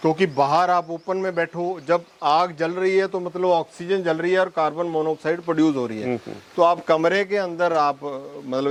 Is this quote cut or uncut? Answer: uncut